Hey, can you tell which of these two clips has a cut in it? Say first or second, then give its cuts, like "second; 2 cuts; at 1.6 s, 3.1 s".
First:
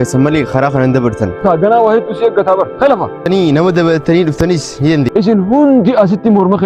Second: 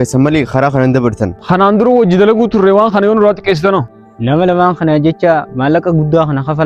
first; 3 cuts; at 1.4 s, 3.3 s, 5.1 s